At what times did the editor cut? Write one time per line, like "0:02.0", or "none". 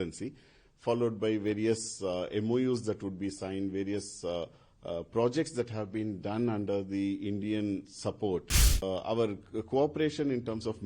0:08.6